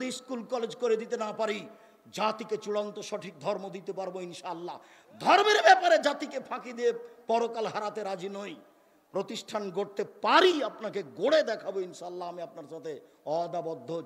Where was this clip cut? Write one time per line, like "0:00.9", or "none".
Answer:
none